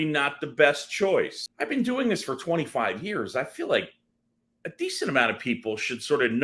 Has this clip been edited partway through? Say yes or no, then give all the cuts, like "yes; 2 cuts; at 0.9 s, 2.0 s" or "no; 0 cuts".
yes; 1 cut; at 1.4 s